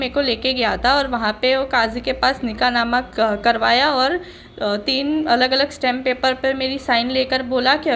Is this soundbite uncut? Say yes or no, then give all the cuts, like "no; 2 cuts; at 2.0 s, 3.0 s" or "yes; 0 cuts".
yes; 0 cuts